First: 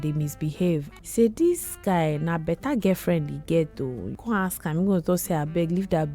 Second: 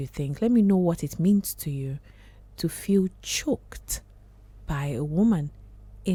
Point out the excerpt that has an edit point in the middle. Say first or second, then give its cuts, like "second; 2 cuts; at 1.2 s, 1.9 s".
first; 2 cuts; at 0.9 s, 4.1 s